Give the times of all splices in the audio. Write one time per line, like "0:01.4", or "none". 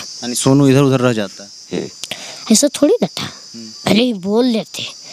none